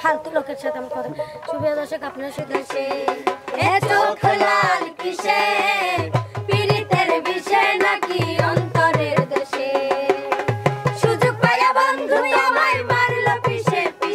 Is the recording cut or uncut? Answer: cut